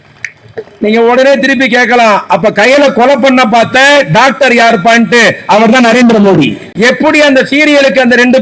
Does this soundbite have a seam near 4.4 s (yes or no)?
no